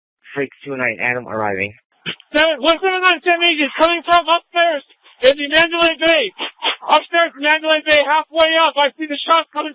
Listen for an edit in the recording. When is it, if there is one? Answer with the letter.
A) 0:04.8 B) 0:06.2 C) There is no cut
B